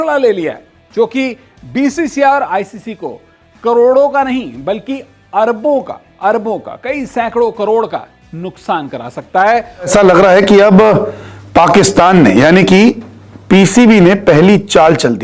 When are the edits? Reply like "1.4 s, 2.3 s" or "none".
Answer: 9.9 s